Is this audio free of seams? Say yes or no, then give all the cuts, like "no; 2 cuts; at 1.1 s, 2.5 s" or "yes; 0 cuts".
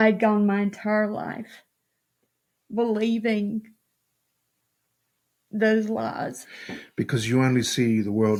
yes; 0 cuts